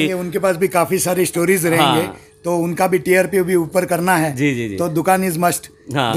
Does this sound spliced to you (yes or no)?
no